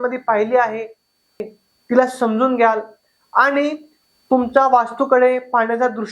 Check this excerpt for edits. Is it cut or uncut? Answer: cut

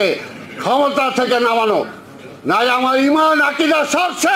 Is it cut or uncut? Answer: uncut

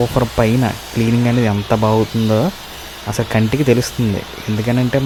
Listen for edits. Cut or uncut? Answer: uncut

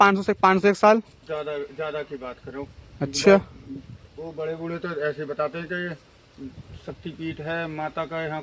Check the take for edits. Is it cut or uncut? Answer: uncut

